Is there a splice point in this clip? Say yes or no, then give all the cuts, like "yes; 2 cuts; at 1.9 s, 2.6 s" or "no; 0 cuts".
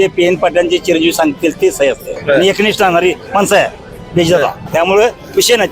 yes; 2 cuts; at 2.1 s, 4.6 s